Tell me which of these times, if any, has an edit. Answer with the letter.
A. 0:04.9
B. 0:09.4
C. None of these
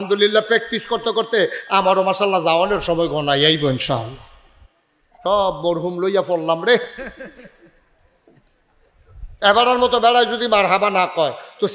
A